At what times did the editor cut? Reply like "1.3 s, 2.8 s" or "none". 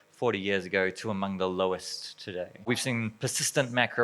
2.7 s

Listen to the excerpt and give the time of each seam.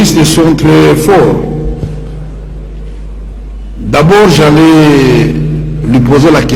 none

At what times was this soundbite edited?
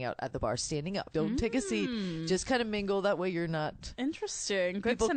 1.1 s, 3.9 s

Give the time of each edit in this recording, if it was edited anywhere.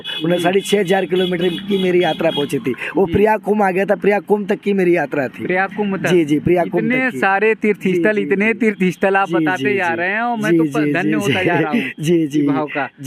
none

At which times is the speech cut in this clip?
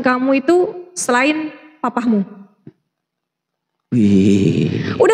3.1 s

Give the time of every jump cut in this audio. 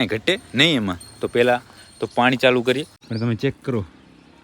2.9 s

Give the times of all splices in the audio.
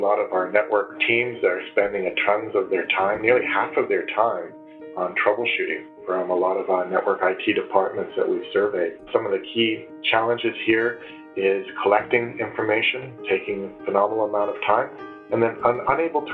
1.0 s

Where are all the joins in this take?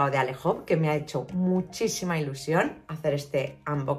none

